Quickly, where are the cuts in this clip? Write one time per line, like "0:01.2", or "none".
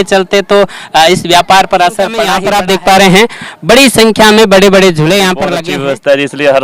0:02.4
0:05.5